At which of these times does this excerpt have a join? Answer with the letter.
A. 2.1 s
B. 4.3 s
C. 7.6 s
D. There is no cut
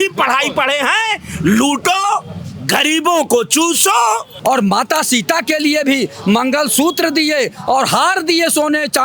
B